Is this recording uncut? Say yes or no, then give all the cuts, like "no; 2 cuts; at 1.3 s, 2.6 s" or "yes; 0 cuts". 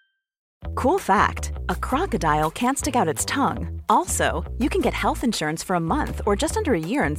yes; 0 cuts